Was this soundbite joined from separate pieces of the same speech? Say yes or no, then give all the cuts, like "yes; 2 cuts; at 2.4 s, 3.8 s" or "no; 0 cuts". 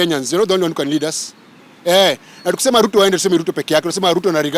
no; 0 cuts